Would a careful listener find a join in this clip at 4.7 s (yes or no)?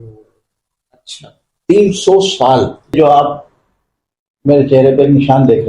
no